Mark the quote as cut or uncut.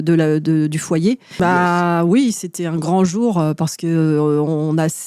cut